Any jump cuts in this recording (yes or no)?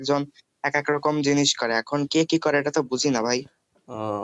no